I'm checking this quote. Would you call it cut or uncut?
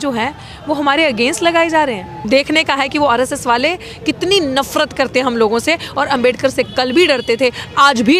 cut